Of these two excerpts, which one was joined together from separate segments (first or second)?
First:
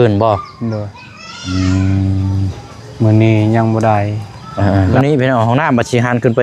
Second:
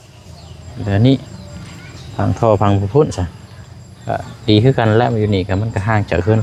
first